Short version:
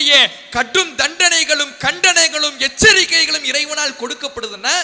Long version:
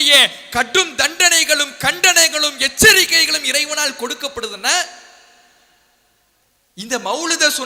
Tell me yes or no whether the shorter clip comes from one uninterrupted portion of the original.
yes